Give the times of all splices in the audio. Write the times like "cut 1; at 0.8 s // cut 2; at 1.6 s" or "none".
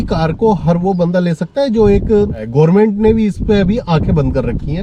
cut 1; at 2.4 s